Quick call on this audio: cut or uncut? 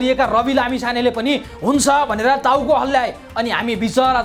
uncut